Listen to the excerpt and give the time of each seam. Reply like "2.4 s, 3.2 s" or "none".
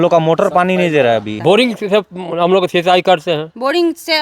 1.3 s